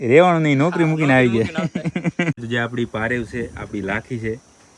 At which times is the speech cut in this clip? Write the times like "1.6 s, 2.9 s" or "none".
2.4 s